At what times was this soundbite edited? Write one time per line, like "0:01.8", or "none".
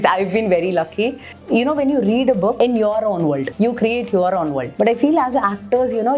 0:01.3
0:02.6
0:03.5
0:04.6